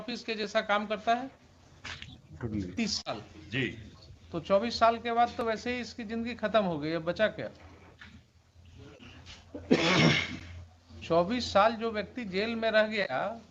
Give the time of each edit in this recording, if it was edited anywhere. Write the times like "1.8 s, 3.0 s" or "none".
2.7 s

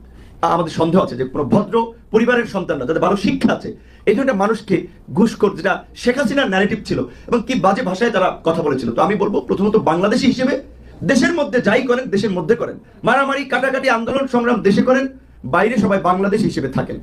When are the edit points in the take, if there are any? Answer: none

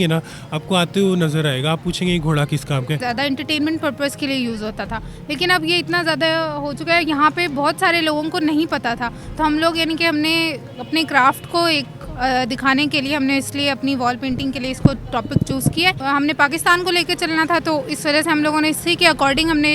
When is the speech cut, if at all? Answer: 3.0 s, 16.0 s

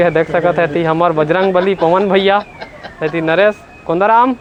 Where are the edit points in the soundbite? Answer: none

